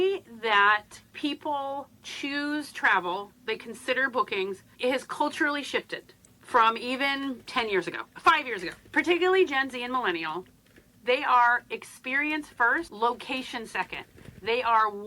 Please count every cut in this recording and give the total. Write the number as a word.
five